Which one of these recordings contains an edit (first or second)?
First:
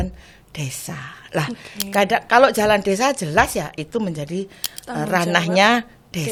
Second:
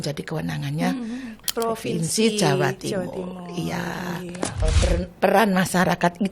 second